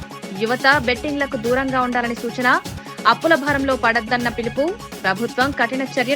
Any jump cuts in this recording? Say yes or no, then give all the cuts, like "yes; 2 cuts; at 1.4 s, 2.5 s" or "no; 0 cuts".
no; 0 cuts